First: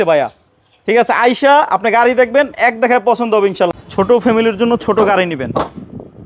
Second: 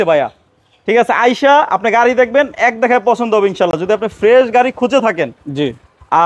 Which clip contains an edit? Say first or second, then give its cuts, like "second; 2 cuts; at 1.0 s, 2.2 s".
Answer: first; 1 cut; at 3.8 s